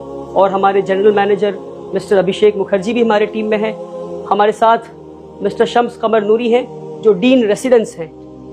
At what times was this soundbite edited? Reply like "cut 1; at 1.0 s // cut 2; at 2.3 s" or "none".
none

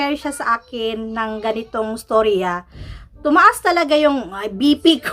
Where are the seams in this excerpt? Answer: none

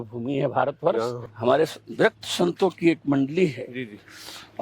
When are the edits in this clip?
cut 1; at 1.2 s

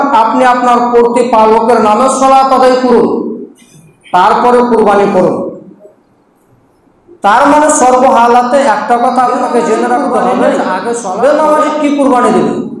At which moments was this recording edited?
cut 1; at 11.2 s

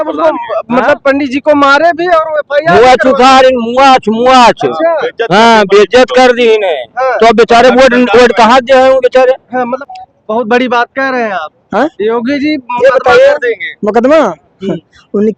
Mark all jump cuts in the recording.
cut 1; at 9.8 s

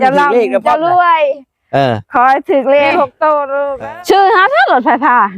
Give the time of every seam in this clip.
cut 1; at 3.7 s

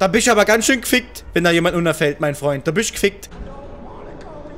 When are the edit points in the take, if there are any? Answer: cut 1; at 3.3 s

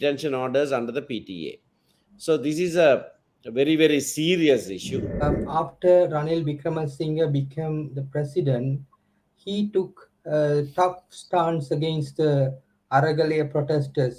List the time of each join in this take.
cut 1; at 5.2 s

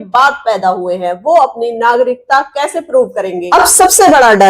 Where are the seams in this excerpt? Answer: cut 1; at 3.4 s

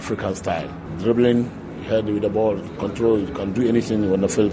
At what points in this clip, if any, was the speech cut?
none

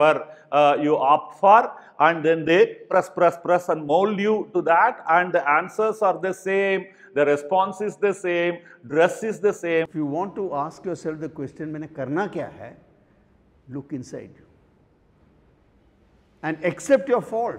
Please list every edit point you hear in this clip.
cut 1; at 9.9 s

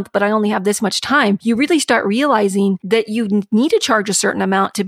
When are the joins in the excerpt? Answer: cut 1; at 1.4 s // cut 2; at 2.8 s

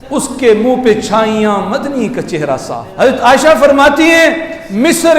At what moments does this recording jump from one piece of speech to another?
cut 1; at 2.8 s

